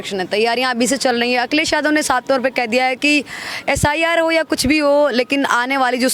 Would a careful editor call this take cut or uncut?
uncut